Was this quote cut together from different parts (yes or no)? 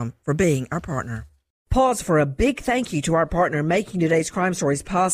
yes